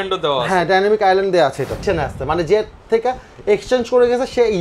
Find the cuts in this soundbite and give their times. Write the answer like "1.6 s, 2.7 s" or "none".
1.8 s